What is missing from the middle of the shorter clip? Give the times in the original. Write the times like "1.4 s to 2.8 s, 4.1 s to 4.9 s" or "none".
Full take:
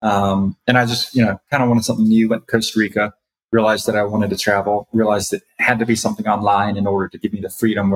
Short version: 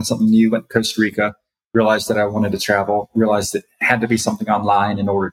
none

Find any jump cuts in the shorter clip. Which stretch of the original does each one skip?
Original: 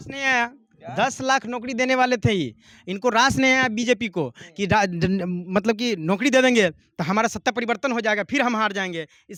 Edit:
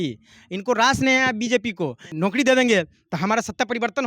4.5 s to 6.0 s

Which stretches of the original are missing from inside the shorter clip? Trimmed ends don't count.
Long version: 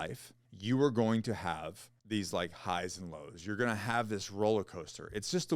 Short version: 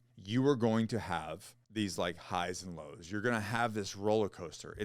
none

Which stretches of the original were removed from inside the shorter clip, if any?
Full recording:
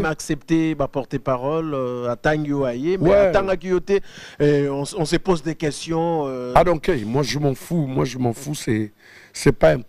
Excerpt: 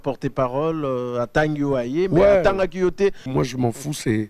4.2 s to 7.9 s

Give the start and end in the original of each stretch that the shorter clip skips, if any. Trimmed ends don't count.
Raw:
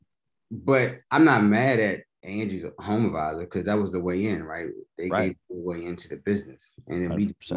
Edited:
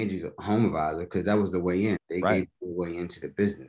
4.4 s to 4.9 s

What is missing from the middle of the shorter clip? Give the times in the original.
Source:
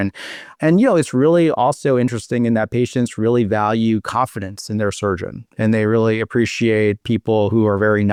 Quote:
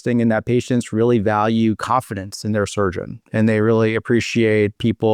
none

